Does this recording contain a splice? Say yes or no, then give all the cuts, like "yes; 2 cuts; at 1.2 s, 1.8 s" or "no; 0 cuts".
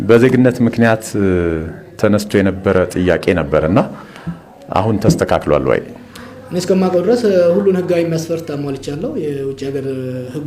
no; 0 cuts